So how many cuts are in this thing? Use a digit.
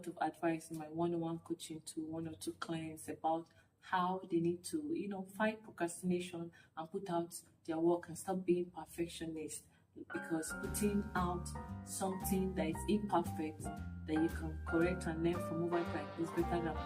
0